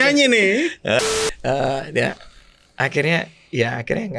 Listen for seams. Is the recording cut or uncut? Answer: cut